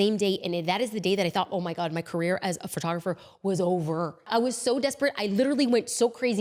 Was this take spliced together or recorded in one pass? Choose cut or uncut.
uncut